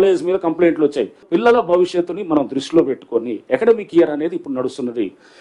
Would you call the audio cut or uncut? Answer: cut